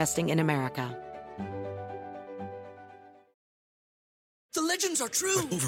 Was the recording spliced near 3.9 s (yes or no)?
no